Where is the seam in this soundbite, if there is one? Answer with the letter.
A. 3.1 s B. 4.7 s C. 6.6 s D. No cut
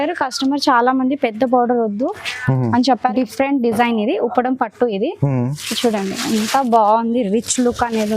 A